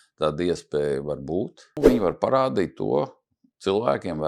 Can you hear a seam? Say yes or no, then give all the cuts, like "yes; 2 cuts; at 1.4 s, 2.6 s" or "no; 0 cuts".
yes; 1 cut; at 1.8 s